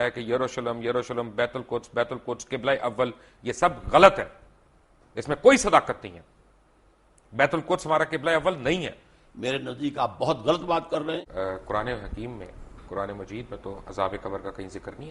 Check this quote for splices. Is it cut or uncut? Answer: cut